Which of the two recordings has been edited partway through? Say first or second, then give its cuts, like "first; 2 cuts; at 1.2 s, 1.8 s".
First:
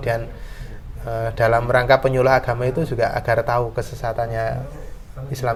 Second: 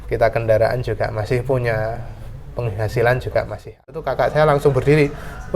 second; 1 cut; at 4.0 s